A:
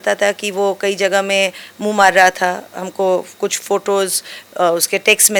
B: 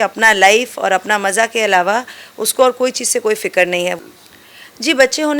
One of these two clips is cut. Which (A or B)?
B